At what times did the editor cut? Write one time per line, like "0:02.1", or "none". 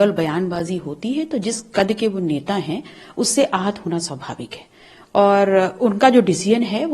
none